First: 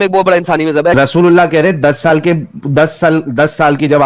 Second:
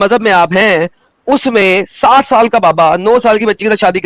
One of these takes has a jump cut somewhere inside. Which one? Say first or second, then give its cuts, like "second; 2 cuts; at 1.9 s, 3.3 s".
first; 1 cut; at 0.9 s